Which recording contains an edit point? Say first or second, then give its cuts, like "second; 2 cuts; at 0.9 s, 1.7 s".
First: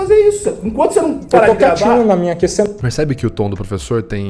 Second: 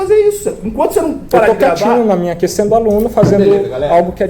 second; 1 cut; at 2.6 s